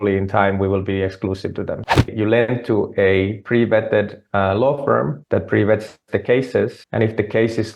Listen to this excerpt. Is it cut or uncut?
cut